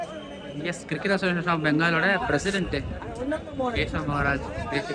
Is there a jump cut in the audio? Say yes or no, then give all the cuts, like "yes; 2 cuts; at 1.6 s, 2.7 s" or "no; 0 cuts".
no; 0 cuts